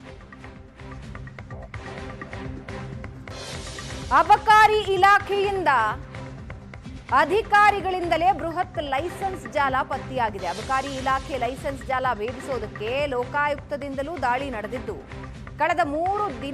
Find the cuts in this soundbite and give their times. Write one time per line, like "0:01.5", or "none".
0:03.1
0:04.1